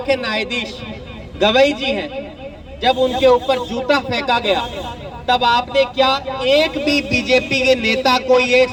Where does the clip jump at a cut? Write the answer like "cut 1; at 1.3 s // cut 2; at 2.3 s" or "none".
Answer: none